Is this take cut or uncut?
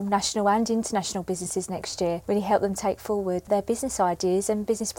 cut